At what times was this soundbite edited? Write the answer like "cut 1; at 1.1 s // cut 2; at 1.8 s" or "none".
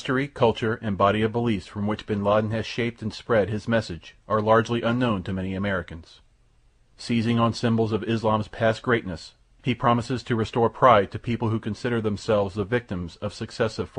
cut 1; at 7.7 s